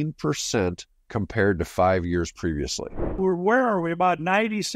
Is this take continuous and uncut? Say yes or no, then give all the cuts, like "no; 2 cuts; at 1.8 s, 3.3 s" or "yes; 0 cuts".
no; 1 cut; at 3.0 s